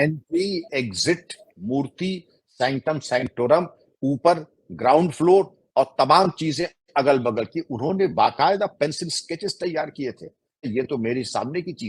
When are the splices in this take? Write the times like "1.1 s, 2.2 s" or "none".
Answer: 10.6 s

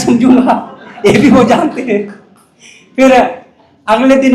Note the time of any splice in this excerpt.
none

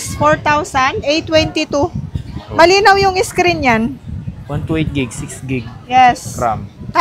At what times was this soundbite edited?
none

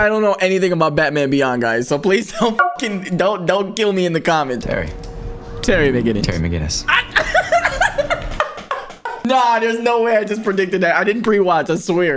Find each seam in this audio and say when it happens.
4.6 s, 9.2 s

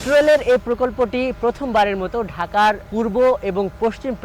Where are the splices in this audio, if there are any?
2.8 s

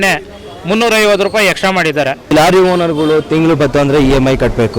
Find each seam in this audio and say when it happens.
2.3 s

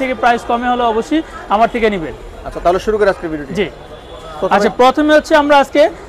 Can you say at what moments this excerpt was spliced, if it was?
none

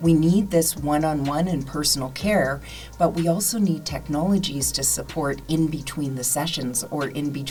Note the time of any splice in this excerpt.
none

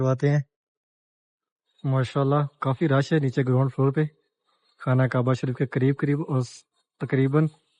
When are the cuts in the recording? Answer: none

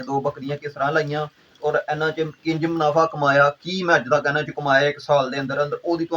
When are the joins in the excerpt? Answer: none

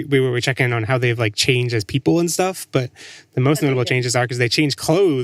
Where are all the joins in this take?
none

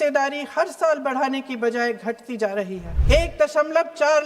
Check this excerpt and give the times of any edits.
2.9 s

